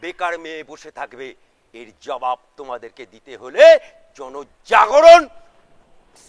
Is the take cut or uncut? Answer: uncut